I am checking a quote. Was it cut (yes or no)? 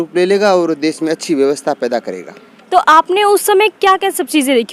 no